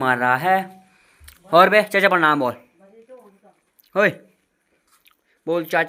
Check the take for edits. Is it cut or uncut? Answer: uncut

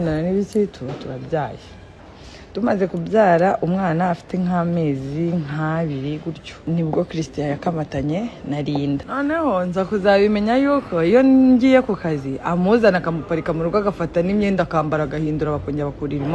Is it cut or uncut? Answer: cut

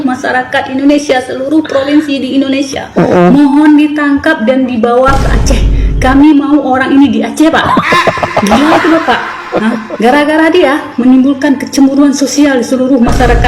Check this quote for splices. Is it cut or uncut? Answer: uncut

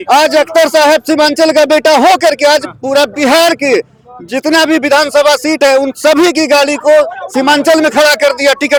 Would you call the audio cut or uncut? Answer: uncut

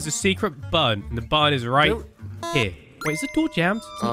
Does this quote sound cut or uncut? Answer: cut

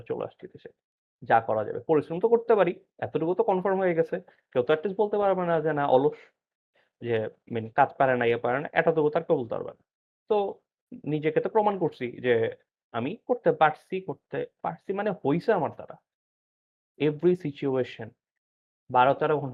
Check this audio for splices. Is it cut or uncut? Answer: uncut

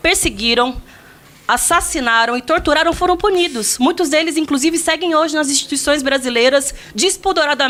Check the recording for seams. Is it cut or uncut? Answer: uncut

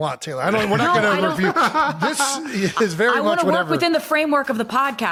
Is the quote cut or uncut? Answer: uncut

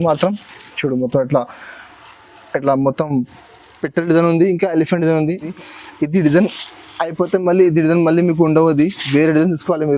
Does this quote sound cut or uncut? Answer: cut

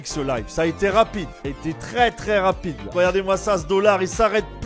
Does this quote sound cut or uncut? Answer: cut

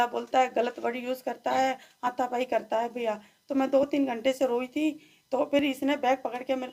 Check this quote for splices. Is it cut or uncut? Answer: uncut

